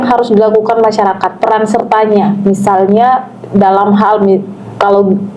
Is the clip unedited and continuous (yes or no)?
yes